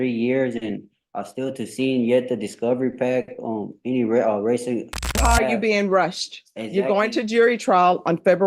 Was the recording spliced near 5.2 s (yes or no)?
yes